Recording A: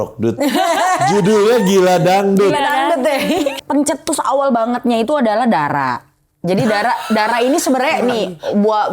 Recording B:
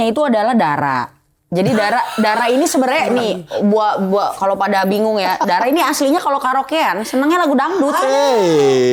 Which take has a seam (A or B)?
A